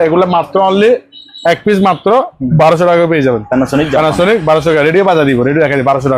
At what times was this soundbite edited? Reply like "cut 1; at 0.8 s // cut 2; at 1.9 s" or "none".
none